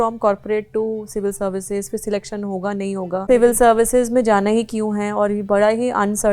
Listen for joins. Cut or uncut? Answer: cut